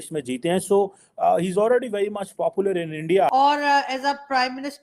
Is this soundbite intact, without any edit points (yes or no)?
no